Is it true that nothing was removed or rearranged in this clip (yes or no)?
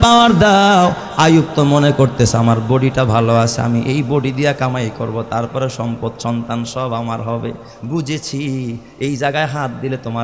yes